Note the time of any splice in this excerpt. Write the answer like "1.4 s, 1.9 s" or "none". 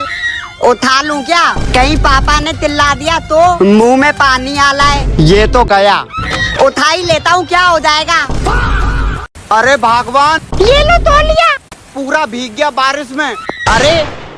9.3 s